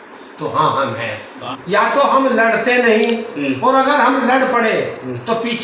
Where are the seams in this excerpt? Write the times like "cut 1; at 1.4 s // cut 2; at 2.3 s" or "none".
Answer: cut 1; at 1.5 s